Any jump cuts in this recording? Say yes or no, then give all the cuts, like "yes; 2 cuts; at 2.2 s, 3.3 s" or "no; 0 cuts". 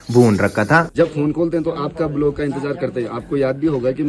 yes; 1 cut; at 0.9 s